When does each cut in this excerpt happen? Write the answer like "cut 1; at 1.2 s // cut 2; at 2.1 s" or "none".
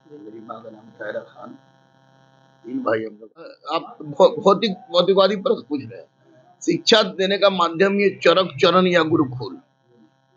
none